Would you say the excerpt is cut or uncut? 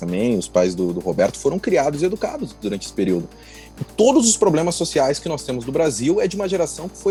uncut